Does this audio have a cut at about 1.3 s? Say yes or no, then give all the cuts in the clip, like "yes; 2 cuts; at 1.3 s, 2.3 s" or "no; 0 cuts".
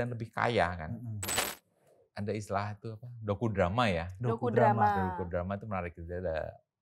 yes; 1 cut; at 1.3 s